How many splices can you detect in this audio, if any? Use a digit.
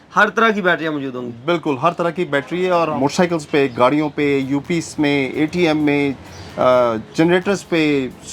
1